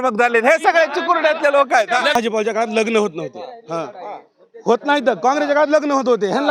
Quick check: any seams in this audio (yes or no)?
yes